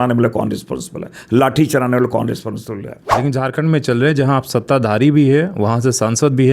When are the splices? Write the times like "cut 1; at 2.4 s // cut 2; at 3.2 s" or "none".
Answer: cut 1; at 3.2 s